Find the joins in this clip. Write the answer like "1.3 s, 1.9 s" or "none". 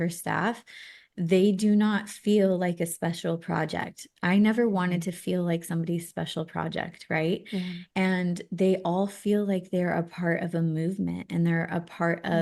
none